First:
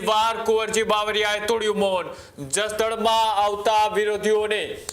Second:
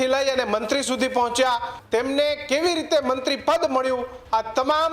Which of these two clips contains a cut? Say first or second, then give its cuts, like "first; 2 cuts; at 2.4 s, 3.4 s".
second; 1 cut; at 1.7 s